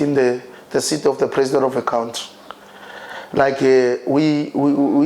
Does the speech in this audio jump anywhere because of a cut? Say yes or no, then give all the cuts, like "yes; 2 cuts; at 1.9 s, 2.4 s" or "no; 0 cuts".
no; 0 cuts